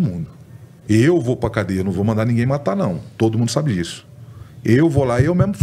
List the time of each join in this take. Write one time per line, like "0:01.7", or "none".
none